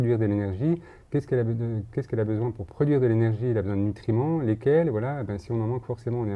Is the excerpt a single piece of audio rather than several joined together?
yes; 0 cuts

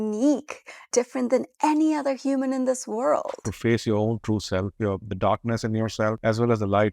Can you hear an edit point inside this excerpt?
yes; 3 cuts; at 0.9 s, 3.5 s, 6.2 s

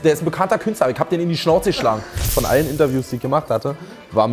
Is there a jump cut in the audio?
yes; 1 cut; at 2.3 s

